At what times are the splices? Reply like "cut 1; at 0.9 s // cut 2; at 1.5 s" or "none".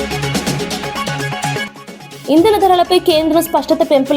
cut 1; at 1.6 s